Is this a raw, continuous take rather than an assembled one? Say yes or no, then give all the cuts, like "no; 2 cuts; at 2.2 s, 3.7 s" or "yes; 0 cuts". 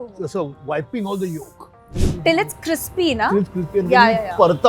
no; 1 cut; at 1.9 s